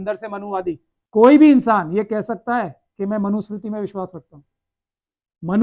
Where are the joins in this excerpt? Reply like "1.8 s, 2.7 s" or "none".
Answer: 0.9 s